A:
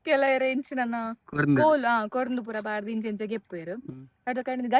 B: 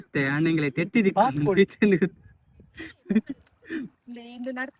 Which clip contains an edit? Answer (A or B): B